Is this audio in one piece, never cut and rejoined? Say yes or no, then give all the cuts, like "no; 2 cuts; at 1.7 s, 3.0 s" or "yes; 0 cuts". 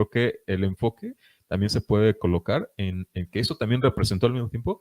yes; 0 cuts